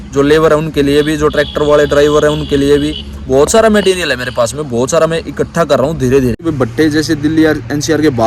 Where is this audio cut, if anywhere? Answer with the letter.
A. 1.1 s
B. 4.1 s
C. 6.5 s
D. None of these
C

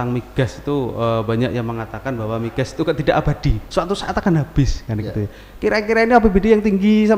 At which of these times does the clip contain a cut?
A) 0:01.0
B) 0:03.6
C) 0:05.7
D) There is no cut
D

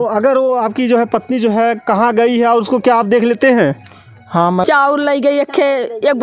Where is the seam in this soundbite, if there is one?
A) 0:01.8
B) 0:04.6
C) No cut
B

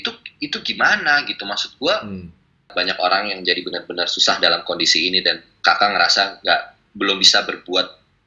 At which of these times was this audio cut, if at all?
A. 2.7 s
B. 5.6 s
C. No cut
A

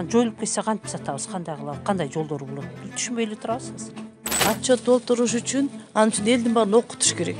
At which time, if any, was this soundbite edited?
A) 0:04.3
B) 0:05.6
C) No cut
A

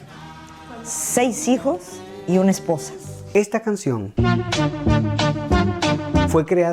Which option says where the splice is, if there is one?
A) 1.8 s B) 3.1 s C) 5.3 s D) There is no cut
B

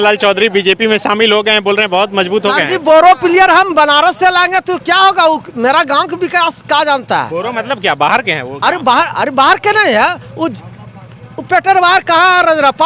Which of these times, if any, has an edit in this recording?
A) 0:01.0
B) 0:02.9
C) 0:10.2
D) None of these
D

